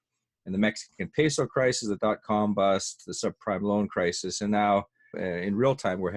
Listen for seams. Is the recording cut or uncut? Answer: cut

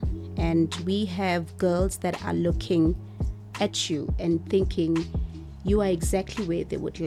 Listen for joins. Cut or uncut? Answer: uncut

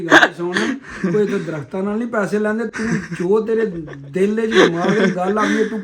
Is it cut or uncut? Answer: uncut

